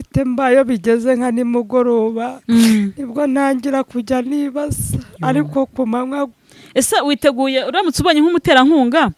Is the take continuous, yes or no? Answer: no